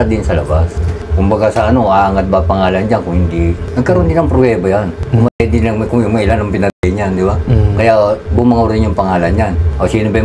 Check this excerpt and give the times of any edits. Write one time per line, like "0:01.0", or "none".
none

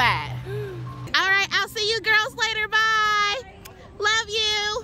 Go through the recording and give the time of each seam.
0:01.0

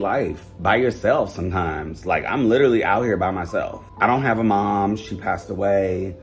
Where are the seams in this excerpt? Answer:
0:03.8

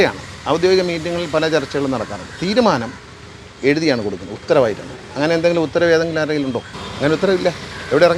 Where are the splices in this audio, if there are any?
none

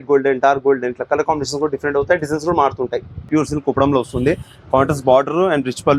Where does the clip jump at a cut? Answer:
0:03.3

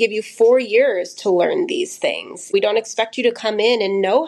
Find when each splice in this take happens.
0:02.5

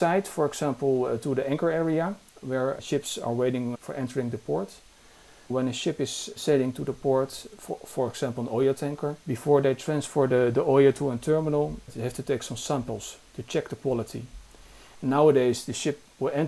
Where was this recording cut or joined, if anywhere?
0:05.5
0:14.9

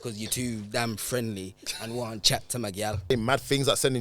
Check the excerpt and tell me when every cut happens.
0:03.1

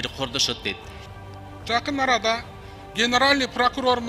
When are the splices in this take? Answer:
0:01.0

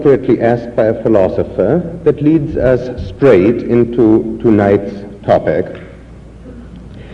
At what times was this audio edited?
none

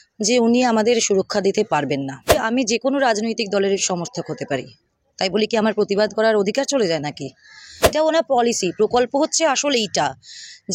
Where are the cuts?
0:02.4
0:07.9

